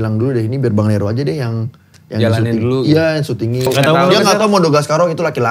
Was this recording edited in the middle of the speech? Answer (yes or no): yes